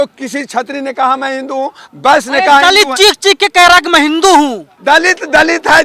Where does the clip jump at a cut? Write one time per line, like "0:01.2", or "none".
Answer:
0:01.8
0:04.7